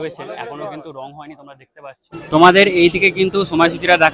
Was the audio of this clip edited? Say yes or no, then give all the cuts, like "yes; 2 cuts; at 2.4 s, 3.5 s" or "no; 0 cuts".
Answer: yes; 1 cut; at 2.1 s